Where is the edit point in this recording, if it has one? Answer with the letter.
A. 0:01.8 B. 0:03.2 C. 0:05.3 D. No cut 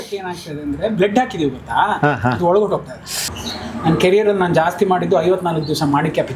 B